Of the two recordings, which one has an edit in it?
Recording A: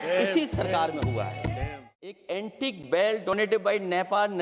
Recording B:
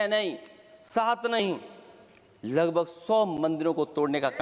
A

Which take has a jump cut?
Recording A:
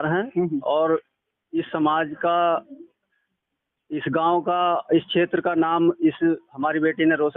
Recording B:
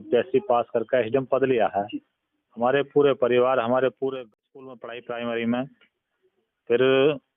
B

